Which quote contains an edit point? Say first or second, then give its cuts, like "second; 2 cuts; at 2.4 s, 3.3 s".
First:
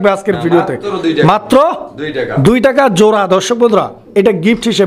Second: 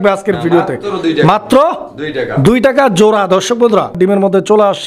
second; 1 cut; at 4.0 s